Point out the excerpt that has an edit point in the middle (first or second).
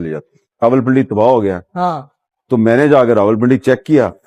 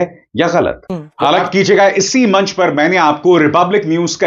second